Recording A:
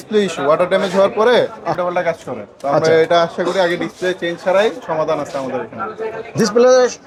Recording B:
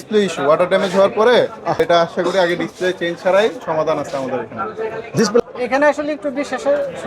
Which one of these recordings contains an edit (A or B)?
B